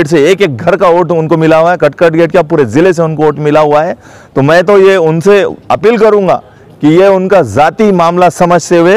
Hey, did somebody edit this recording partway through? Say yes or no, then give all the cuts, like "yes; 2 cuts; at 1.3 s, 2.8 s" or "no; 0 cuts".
no; 0 cuts